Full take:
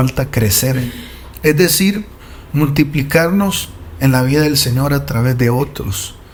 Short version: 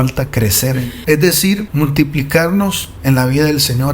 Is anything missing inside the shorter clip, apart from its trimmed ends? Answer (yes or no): yes